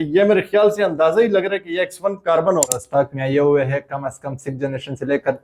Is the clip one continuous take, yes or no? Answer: no